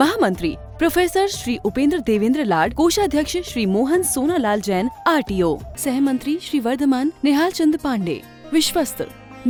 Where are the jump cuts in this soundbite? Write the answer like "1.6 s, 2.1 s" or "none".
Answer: none